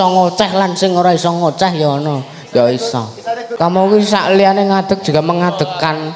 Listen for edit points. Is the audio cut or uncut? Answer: cut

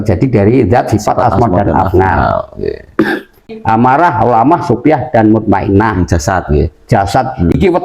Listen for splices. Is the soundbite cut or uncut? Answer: cut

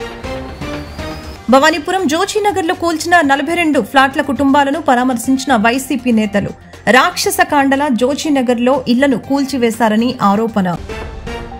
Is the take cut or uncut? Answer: uncut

